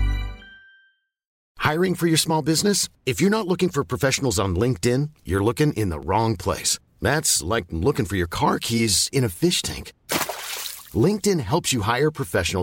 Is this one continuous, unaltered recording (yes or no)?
no